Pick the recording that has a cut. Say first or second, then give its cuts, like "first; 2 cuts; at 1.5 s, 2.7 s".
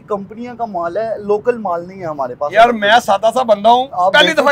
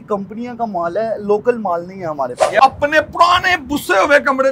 second; 1 cut; at 2.5 s